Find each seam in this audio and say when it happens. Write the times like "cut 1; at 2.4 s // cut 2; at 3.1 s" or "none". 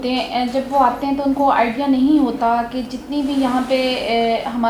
none